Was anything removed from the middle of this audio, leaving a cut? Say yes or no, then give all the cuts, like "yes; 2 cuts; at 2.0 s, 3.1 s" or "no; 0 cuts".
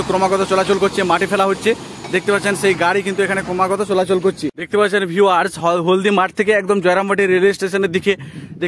yes; 1 cut; at 4.6 s